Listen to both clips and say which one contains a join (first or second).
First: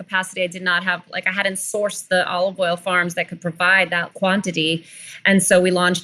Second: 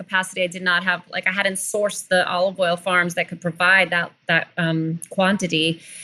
first